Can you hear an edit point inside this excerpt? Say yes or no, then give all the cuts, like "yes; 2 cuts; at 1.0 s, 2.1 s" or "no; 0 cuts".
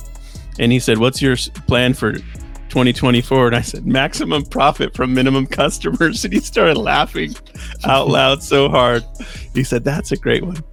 no; 0 cuts